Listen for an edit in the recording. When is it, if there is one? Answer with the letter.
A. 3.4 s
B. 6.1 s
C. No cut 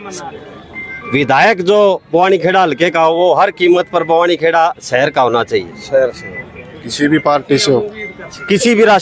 C